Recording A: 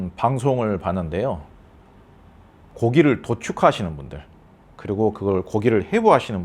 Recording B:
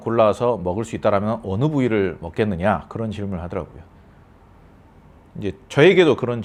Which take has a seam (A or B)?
A